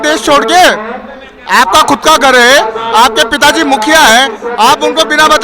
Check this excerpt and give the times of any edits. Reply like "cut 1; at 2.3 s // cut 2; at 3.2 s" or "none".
none